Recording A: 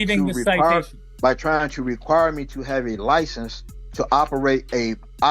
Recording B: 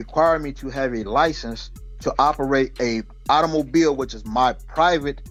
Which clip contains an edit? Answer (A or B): A